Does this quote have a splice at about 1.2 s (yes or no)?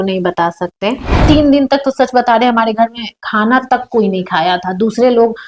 yes